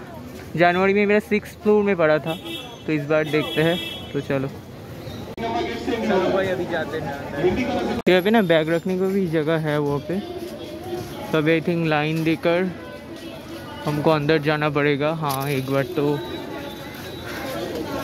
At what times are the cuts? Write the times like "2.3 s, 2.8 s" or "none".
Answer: 5.3 s